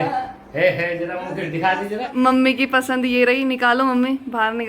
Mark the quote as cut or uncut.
cut